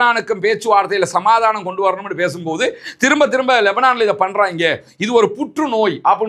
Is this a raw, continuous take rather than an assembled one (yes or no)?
yes